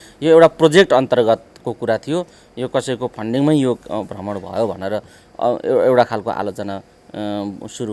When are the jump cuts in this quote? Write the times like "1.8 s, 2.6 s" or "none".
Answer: none